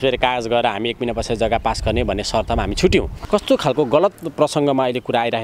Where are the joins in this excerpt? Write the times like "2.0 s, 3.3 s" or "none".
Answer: 3.2 s